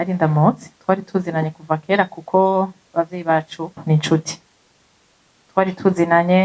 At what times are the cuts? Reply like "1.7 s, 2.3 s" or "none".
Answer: none